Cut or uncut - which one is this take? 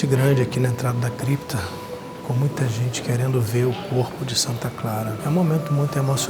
cut